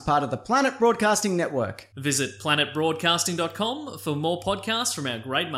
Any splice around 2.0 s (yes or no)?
no